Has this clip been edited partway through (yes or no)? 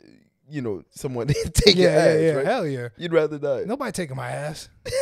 no